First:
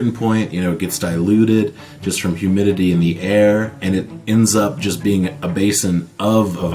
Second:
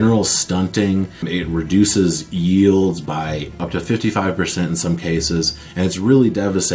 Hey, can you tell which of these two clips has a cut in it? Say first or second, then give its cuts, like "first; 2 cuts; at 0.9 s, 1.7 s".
second; 2 cuts; at 1.2 s, 3.6 s